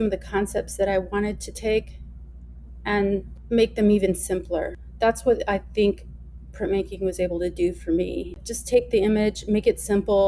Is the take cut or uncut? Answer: cut